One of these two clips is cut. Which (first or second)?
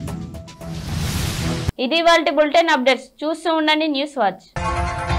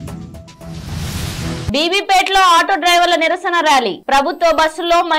second